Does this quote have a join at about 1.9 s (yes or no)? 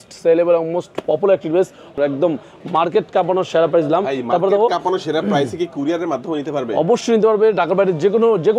yes